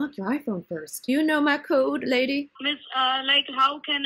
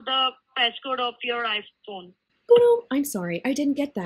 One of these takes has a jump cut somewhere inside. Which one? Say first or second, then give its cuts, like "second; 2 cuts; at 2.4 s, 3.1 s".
first; 2 cuts; at 1.1 s, 2.5 s